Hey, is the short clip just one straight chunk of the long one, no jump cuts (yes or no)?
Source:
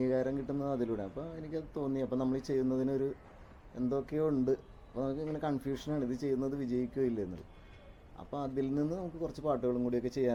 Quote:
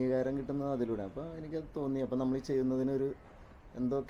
yes